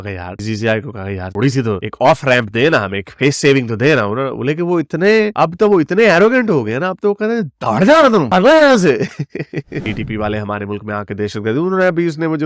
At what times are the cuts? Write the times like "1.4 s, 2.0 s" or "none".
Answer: 9.8 s

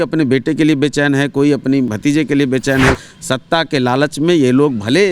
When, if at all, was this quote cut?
1.9 s, 3.0 s

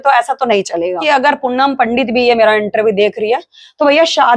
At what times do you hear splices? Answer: 1.0 s

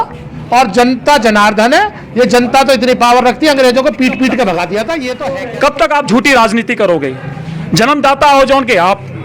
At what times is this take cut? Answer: 5.1 s

